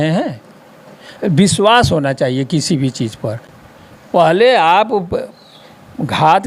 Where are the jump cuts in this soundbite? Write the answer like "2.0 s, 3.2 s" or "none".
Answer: 3.5 s